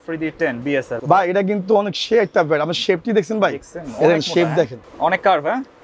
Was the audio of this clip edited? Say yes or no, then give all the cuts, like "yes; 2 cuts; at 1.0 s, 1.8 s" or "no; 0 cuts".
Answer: yes; 2 cuts; at 0.9 s, 4.8 s